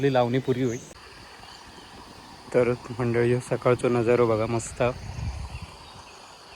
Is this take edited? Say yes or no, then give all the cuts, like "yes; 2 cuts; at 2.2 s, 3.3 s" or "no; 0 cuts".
yes; 1 cut; at 0.9 s